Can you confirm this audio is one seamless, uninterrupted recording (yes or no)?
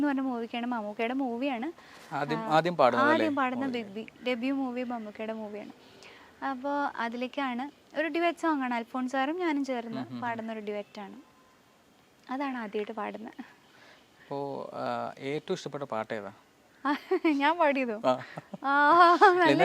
yes